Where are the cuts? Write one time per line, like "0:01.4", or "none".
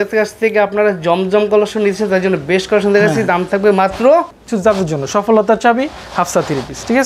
0:04.4